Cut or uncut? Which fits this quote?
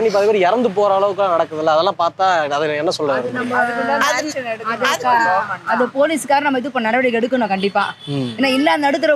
uncut